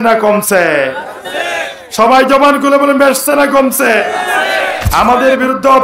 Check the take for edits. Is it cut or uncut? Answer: cut